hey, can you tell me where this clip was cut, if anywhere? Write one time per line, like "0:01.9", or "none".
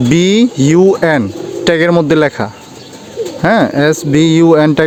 none